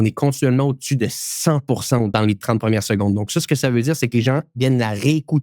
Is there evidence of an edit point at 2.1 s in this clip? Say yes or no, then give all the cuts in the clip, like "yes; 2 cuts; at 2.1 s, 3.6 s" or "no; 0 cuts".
yes; 1 cut; at 2.1 s